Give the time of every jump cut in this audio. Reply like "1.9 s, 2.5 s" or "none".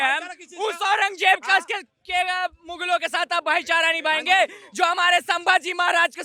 none